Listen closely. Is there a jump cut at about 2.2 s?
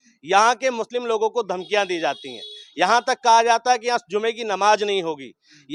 no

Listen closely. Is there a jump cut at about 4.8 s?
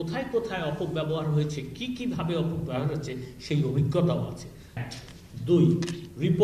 yes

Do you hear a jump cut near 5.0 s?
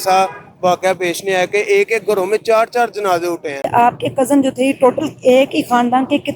no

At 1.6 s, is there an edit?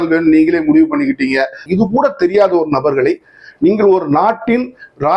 yes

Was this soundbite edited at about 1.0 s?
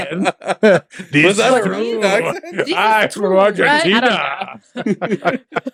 no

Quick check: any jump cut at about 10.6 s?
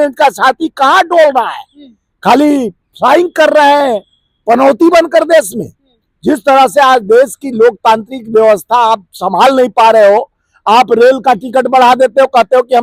no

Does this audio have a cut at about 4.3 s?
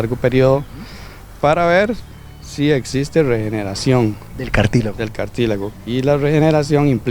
no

